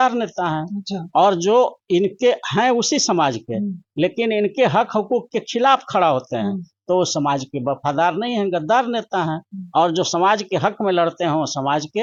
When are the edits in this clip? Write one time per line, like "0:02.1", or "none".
none